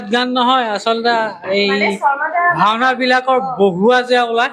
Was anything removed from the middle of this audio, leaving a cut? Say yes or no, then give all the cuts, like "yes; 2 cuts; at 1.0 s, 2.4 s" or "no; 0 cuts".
no; 0 cuts